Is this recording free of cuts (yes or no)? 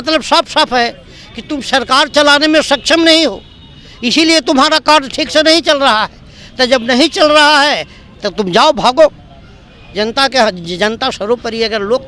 yes